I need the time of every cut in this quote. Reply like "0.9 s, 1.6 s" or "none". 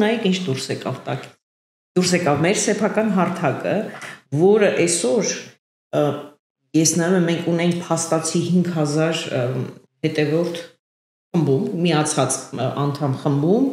none